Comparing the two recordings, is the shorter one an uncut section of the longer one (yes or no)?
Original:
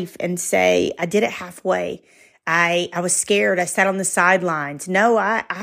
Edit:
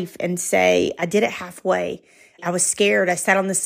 no